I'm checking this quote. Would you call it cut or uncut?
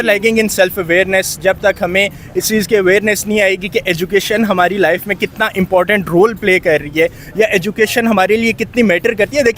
uncut